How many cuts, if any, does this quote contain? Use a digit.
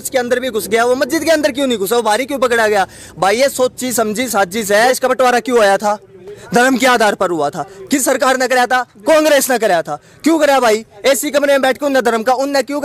1